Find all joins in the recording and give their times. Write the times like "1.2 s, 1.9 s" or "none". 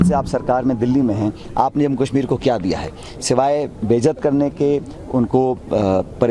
none